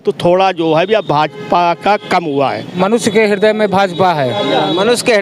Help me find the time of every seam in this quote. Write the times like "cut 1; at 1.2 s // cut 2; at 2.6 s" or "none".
cut 1; at 2.7 s